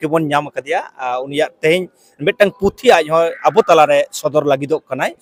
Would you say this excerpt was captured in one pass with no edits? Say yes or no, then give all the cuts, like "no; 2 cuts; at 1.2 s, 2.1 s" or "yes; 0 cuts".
yes; 0 cuts